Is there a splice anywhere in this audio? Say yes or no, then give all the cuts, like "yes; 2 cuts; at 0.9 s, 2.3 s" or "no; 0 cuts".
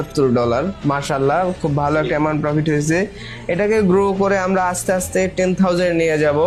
no; 0 cuts